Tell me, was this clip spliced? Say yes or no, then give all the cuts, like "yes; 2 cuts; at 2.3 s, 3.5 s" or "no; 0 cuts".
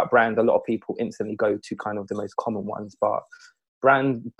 no; 0 cuts